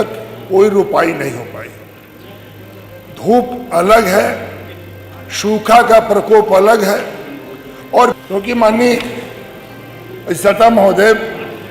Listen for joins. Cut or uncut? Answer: cut